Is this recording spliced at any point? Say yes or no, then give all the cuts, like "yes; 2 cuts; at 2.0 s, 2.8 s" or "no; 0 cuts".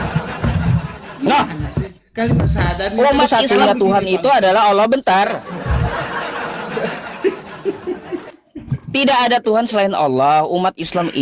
yes; 1 cut; at 3.4 s